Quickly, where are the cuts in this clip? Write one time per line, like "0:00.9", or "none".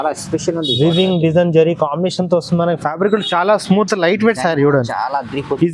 none